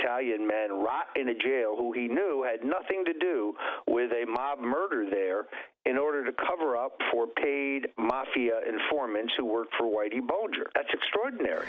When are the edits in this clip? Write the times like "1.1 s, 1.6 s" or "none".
10.7 s